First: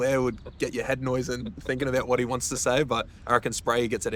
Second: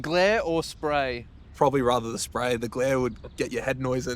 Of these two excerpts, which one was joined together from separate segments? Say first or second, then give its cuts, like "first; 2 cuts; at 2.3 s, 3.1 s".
second; 1 cut; at 1.5 s